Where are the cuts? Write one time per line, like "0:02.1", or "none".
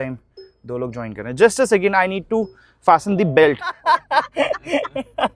0:03.8